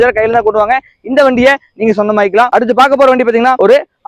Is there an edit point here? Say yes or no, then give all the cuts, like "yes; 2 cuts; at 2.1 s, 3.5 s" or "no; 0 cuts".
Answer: no; 0 cuts